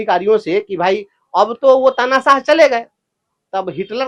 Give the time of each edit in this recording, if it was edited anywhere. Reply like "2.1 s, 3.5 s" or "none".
none